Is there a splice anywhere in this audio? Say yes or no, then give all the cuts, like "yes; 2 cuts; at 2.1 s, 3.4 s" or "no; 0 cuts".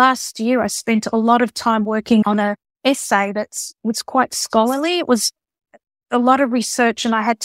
yes; 1 cut; at 2.2 s